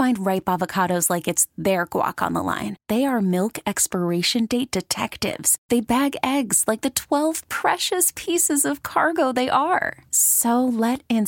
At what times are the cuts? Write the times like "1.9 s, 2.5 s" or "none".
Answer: none

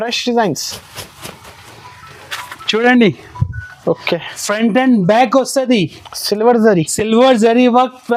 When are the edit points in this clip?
none

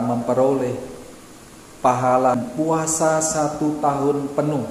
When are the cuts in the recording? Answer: 2.4 s

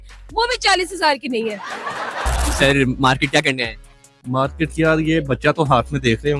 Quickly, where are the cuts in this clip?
2.5 s

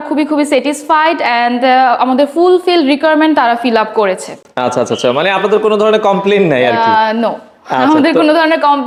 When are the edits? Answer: none

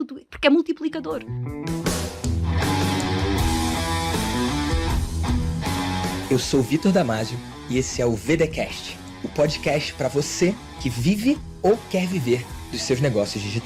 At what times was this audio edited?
1.3 s

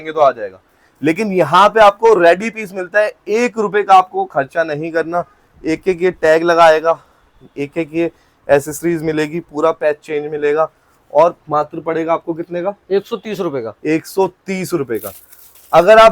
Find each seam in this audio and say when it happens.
none

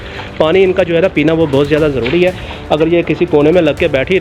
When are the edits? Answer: none

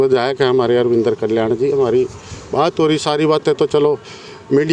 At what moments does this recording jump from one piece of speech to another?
none

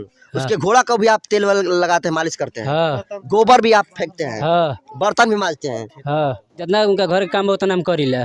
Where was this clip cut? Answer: 6.6 s

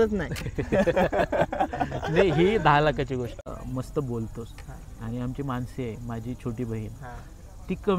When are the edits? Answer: 3.5 s

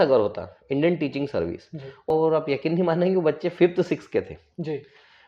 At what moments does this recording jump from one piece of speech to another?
2.1 s

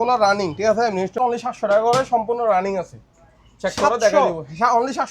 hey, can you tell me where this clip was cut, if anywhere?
1.1 s

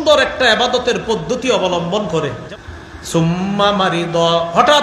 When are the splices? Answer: 2.4 s

